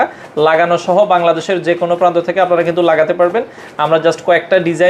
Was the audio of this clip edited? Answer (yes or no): no